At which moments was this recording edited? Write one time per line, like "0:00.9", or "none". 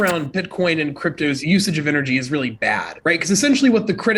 0:01.4